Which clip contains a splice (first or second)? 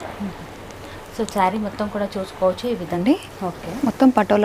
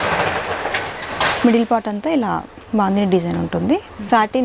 first